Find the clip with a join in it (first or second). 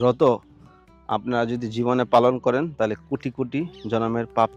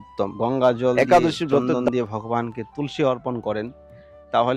second